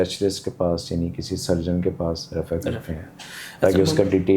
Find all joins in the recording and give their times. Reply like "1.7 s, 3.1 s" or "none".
none

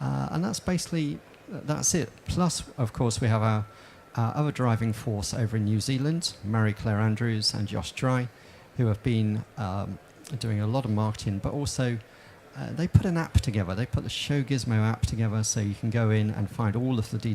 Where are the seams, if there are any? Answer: 5.0 s

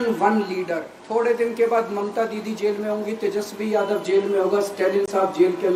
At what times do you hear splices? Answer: 0.9 s

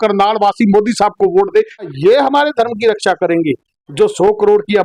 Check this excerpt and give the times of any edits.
2.2 s

